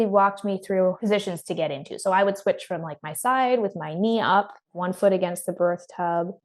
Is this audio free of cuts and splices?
no; 1 cut; at 1.0 s

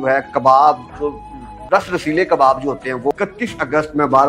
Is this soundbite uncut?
no; 1 cut; at 3.1 s

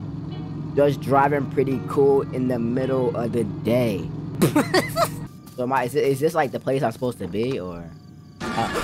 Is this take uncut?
no; 2 cuts; at 4.2 s, 5.2 s

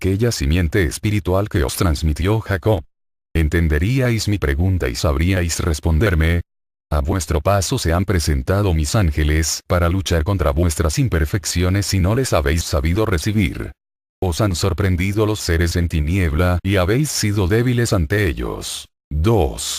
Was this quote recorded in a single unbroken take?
no; 1 cut; at 11.1 s

